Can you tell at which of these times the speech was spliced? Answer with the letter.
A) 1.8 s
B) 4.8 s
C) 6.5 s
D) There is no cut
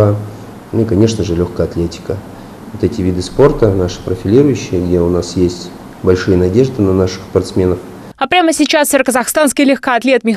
D